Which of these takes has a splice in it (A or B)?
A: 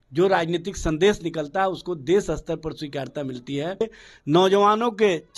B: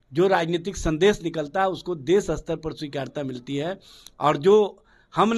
A